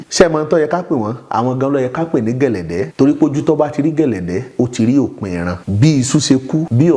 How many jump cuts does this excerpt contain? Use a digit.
1